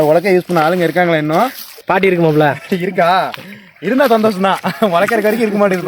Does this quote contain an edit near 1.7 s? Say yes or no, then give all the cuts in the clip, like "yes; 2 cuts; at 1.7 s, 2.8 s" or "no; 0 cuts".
yes; 1 cut; at 1.7 s